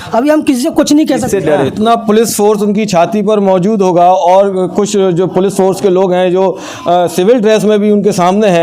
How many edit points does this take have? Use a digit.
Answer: 1